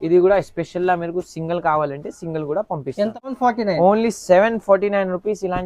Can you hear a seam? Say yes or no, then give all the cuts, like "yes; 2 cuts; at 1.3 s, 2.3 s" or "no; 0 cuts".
yes; 1 cut; at 3.3 s